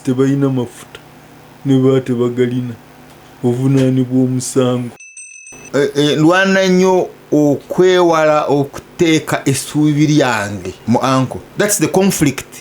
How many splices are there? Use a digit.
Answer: 3